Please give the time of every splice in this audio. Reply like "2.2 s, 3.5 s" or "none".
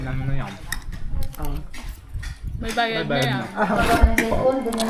3.8 s